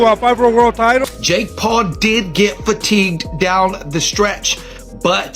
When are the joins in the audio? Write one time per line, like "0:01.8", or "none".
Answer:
0:01.0